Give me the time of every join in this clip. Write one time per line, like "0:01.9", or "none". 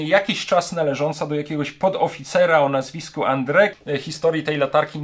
0:03.8